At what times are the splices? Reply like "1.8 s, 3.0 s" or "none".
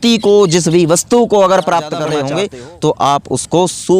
2.1 s